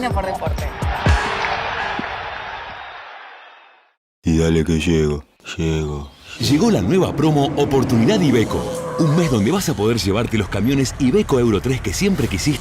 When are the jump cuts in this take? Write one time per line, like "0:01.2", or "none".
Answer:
0:04.2